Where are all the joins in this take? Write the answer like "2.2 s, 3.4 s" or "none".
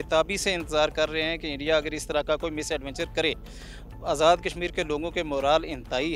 0.9 s